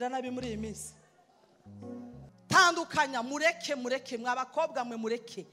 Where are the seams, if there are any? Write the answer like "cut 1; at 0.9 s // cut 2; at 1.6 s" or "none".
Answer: cut 1; at 2.3 s